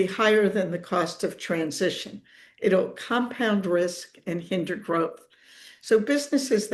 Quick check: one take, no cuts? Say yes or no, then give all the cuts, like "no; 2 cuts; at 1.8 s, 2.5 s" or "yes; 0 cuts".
yes; 0 cuts